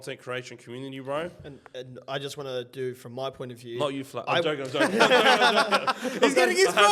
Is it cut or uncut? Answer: uncut